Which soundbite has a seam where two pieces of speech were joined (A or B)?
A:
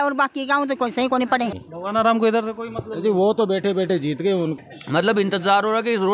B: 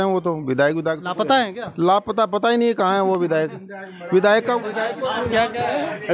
A